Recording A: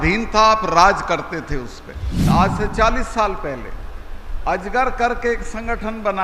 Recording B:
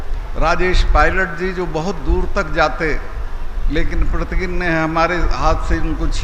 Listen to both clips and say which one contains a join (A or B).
A